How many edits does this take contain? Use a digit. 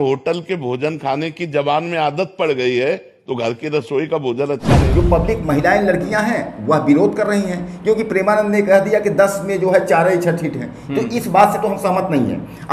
1